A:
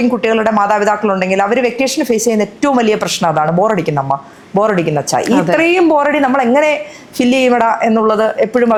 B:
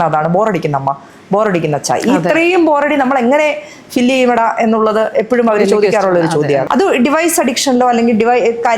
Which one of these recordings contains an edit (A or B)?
B